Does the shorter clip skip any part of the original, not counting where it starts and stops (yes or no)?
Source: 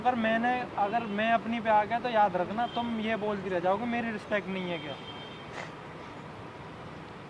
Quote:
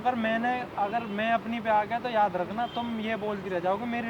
no